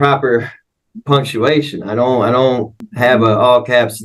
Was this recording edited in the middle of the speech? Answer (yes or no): yes